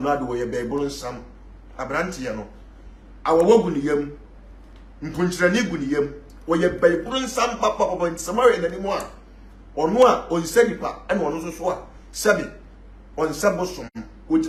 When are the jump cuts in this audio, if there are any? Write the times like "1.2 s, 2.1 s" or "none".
none